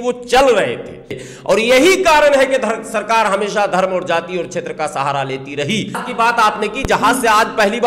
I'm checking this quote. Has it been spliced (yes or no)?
yes